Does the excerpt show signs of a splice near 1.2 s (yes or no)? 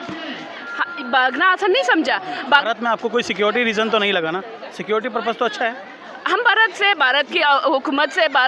no